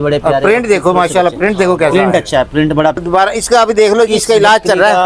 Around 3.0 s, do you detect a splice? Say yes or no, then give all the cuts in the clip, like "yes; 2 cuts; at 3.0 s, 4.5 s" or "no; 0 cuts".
yes; 1 cut; at 3.0 s